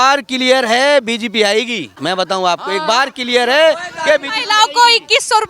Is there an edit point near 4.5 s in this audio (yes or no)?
no